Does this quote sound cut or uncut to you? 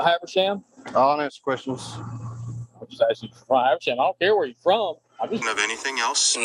cut